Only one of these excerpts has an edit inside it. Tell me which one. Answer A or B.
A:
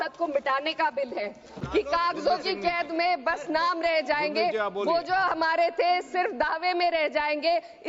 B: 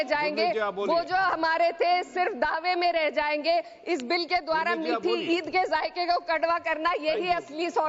A